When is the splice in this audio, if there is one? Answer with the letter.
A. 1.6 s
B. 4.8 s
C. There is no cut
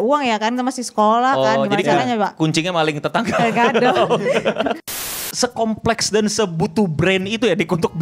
B